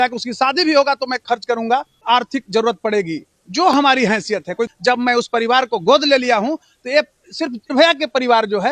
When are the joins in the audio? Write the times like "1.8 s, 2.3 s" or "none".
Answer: 2.0 s, 4.7 s, 7.7 s